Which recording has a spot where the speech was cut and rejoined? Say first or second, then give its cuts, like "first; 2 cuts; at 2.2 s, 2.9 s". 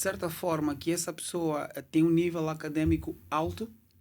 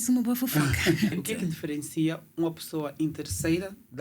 second; 1 cut; at 1.1 s